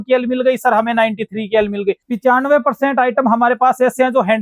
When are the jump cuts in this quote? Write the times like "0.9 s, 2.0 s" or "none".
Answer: 2.1 s